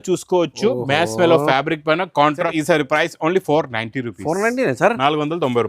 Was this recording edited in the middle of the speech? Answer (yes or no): yes